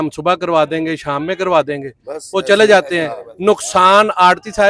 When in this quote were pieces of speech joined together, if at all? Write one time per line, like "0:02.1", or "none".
none